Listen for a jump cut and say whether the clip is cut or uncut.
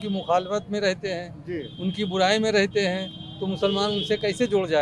uncut